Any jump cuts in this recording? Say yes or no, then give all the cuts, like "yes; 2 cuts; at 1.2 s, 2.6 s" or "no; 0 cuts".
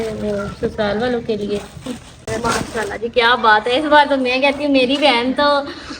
yes; 1 cut; at 2.3 s